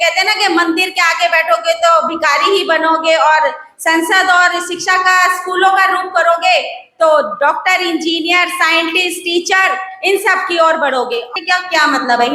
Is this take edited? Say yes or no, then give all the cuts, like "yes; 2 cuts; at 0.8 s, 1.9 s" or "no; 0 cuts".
yes; 1 cut; at 11.3 s